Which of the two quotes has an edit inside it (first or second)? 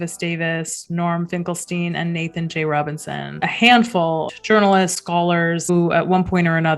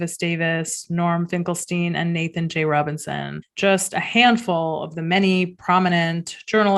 first